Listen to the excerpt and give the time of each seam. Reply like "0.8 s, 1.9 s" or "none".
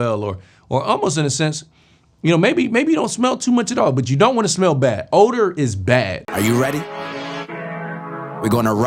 6.2 s